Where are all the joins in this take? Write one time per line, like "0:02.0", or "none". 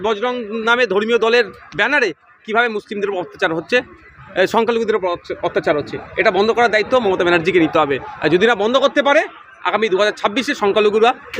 none